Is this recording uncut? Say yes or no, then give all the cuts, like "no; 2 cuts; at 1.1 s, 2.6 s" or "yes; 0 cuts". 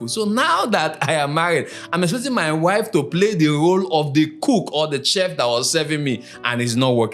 yes; 0 cuts